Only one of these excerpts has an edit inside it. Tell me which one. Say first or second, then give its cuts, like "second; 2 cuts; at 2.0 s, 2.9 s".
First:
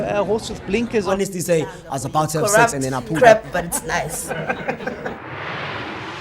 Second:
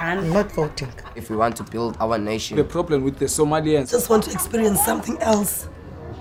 first; 1 cut; at 3.5 s